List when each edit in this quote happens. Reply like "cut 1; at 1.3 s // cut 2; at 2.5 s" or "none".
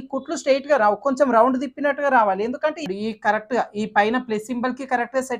cut 1; at 2.8 s